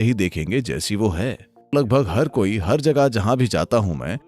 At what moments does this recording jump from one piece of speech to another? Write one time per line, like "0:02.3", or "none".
0:01.5